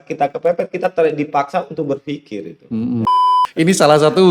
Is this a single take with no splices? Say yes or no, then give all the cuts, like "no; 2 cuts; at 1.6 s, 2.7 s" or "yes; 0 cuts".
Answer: no; 1 cut; at 3.0 s